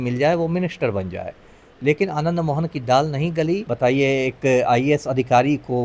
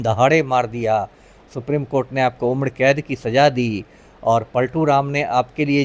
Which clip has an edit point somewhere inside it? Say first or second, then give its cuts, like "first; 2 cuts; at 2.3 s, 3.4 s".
first; 1 cut; at 3.7 s